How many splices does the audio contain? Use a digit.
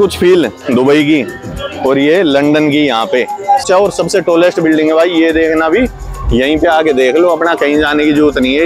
1